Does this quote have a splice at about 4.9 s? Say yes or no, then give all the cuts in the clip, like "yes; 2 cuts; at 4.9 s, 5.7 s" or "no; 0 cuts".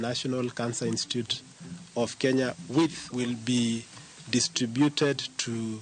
no; 1 cut; at 3.0 s